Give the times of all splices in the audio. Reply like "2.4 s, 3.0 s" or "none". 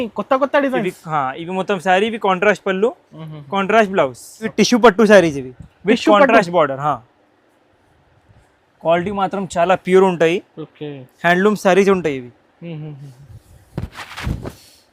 4.5 s